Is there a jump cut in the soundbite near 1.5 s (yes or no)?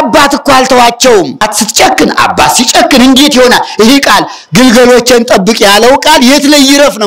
yes